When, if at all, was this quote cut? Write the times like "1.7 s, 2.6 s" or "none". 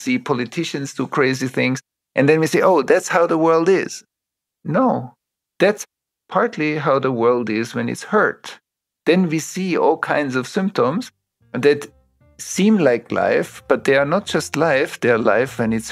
1.9 s, 4.2 s